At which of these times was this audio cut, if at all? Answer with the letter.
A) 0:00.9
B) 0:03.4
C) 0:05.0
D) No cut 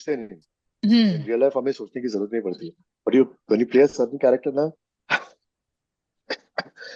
D